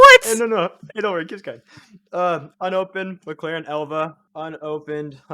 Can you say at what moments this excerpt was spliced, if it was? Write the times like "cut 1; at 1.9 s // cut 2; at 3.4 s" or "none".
cut 1; at 4.2 s